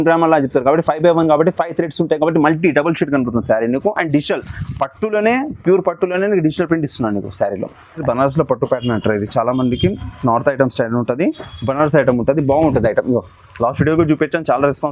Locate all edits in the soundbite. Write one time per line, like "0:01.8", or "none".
0:08.0